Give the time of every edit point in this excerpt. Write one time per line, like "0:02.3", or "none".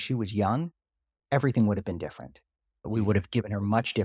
0:02.9